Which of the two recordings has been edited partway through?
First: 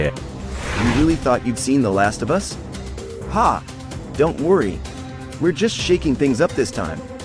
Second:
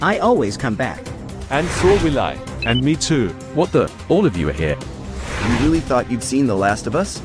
second; 1 cut; at 3.4 s

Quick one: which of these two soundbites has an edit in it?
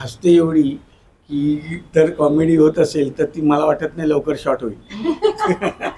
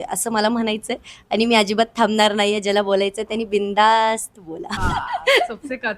second; 1 cut; at 4.7 s

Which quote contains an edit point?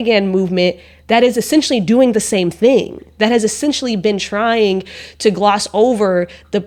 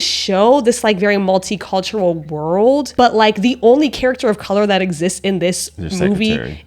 second; 1 cut; at 2.9 s

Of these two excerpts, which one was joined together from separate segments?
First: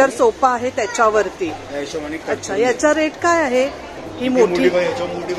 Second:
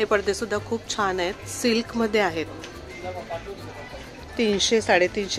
first; 1 cut; at 3.9 s

